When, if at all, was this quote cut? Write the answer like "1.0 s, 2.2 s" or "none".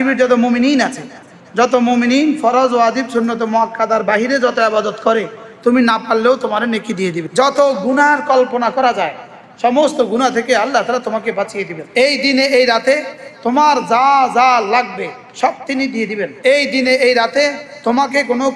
7.2 s, 11.8 s, 16.3 s